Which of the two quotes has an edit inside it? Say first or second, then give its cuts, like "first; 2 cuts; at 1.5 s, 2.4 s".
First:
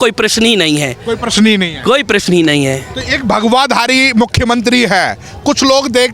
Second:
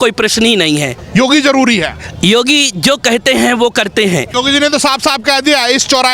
second; 2 cuts; at 0.9 s, 4.3 s